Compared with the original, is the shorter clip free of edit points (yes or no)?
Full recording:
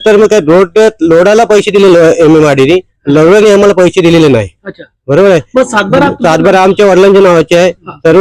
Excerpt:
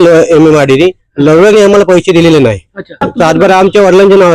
no